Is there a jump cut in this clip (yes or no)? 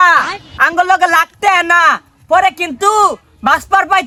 no